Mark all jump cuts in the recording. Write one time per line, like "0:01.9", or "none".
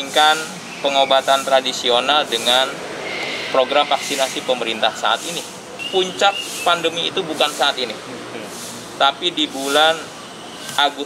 0:05.8